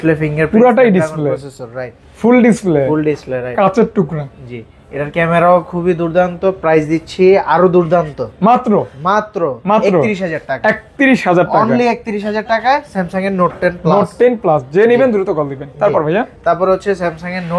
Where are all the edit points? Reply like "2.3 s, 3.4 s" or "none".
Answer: none

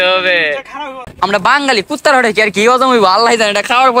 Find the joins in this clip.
1.0 s

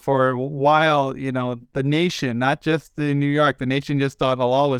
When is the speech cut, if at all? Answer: none

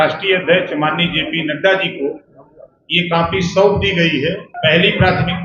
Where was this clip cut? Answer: 4.5 s

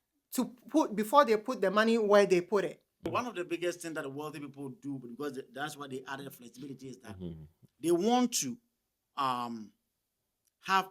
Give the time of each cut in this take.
3.1 s

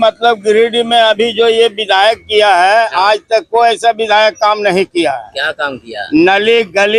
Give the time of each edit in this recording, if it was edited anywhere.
none

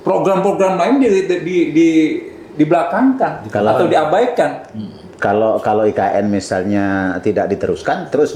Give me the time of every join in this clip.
none

